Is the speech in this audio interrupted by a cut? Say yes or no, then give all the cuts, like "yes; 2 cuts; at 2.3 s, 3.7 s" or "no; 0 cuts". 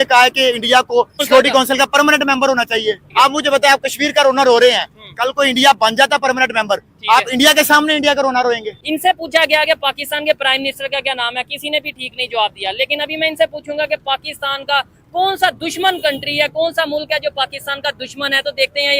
yes; 3 cuts; at 1.2 s, 3.0 s, 8.7 s